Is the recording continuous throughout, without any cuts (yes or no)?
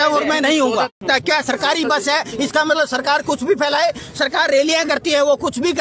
no